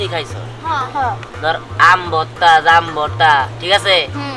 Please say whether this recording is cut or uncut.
uncut